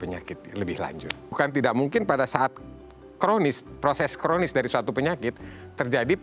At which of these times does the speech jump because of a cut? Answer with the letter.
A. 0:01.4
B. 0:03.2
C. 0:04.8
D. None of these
A